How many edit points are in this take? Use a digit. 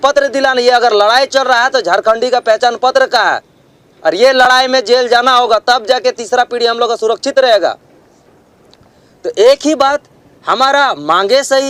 0